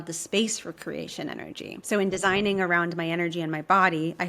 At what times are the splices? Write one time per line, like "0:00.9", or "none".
0:01.7

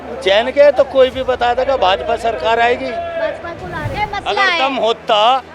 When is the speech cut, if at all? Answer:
0:03.9

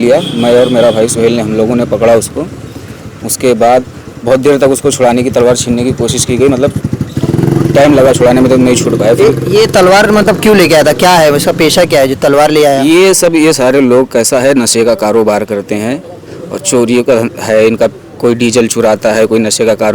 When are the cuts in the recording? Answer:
none

